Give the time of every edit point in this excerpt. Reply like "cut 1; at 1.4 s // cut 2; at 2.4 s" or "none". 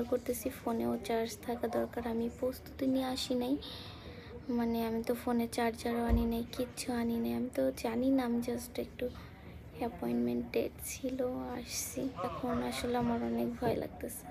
cut 1; at 12.3 s